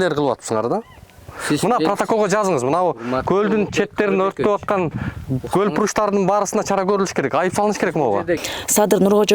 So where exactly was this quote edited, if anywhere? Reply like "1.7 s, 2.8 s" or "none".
8.4 s